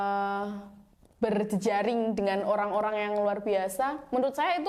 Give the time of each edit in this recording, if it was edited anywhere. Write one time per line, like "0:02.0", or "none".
none